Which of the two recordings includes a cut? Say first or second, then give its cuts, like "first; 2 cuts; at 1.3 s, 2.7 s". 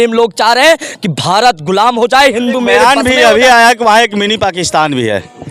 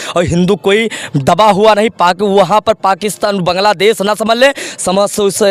first; 1 cut; at 2.8 s